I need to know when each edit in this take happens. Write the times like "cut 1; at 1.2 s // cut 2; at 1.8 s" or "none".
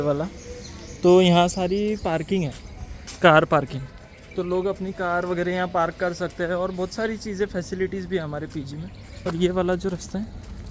cut 1; at 9.3 s